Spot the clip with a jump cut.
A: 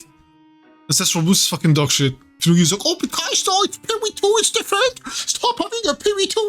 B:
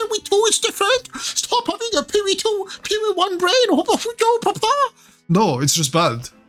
A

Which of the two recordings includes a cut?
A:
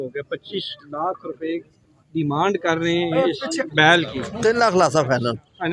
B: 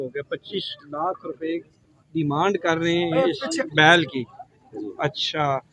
A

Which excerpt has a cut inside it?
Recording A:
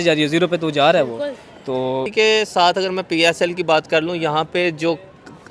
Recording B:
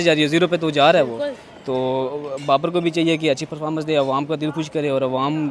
A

